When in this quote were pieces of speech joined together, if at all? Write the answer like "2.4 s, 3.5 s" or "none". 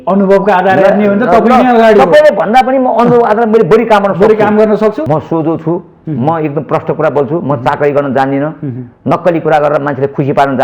5.0 s